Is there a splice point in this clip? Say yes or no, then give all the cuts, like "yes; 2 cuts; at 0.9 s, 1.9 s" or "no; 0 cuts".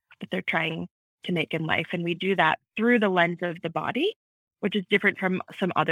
no; 0 cuts